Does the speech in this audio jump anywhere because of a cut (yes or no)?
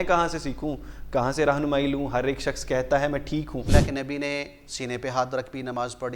yes